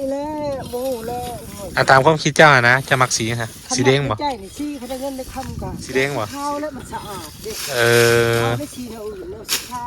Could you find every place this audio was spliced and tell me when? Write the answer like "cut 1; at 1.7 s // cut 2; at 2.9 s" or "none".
cut 1; at 5.8 s

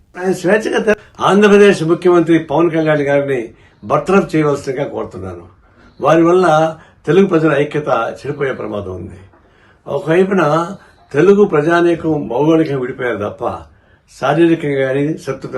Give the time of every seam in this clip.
cut 1; at 0.9 s

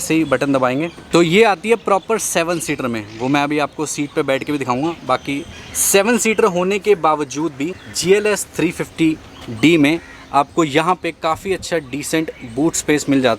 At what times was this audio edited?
none

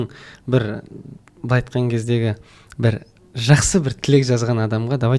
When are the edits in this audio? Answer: none

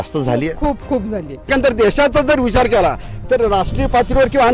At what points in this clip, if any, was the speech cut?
cut 1; at 1.5 s

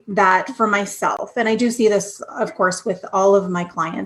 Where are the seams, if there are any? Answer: none

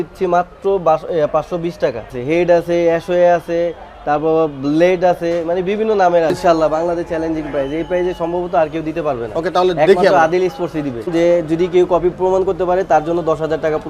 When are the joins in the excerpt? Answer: cut 1; at 2.2 s // cut 2; at 6.3 s // cut 3; at 11.1 s

